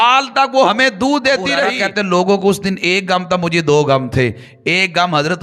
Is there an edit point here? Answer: yes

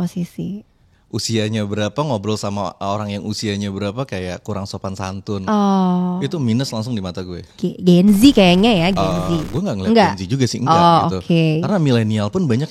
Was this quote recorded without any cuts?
yes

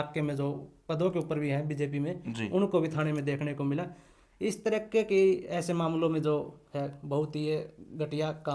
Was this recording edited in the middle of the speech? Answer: no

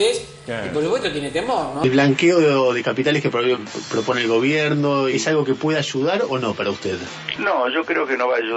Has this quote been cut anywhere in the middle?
yes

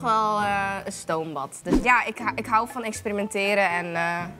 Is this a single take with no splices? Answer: no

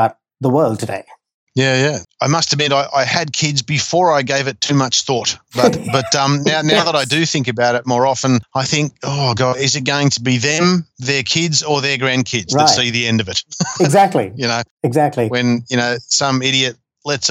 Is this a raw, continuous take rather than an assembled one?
no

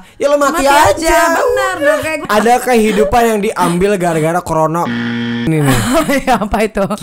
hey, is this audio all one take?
no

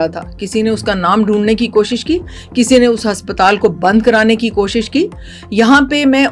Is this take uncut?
yes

